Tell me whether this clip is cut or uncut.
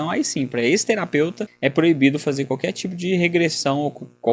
cut